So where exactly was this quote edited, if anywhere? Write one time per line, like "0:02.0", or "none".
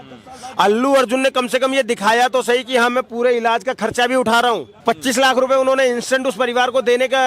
0:04.7